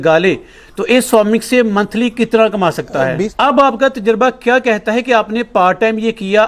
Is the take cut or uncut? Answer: cut